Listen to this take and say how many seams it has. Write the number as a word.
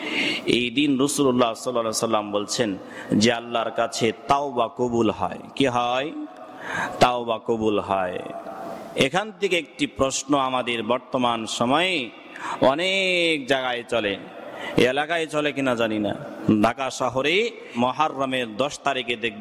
zero